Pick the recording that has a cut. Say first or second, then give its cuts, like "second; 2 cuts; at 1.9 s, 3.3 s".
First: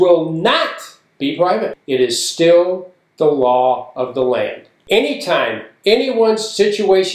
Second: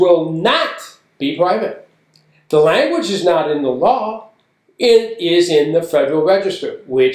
first; 2 cuts; at 1.8 s, 4.7 s